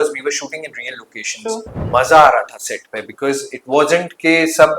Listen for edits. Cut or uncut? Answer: cut